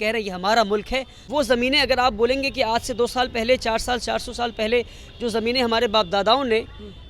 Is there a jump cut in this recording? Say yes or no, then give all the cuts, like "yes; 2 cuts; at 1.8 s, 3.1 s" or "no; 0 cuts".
yes; 1 cut; at 1.2 s